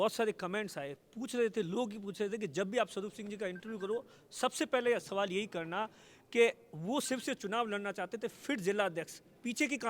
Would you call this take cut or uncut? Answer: uncut